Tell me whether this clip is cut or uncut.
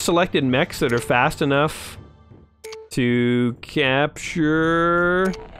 uncut